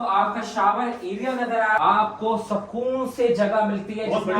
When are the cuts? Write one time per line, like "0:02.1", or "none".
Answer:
0:01.8